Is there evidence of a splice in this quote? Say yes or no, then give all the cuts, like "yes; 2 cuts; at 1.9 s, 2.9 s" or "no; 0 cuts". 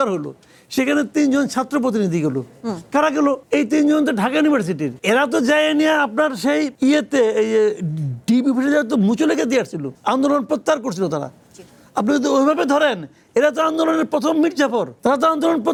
no; 0 cuts